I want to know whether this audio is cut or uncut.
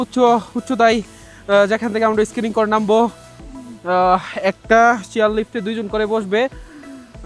uncut